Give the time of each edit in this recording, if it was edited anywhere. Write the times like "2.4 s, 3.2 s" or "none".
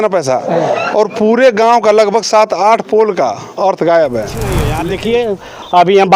4.7 s